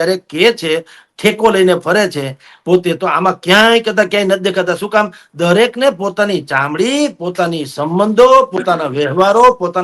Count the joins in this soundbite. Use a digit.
0